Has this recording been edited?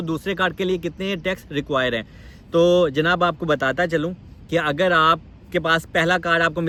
no; 0 cuts

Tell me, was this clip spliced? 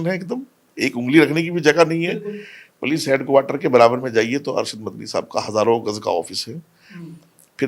no; 0 cuts

